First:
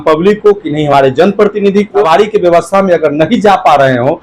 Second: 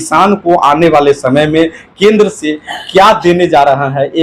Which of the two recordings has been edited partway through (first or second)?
first